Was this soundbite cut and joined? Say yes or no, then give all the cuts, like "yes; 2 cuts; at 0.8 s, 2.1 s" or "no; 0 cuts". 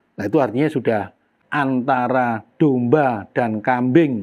yes; 1 cut; at 1.2 s